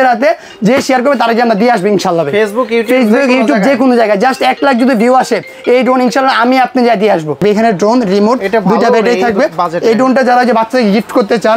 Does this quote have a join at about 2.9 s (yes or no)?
no